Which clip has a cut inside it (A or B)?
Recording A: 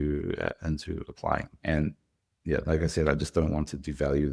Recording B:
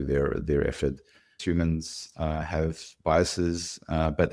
B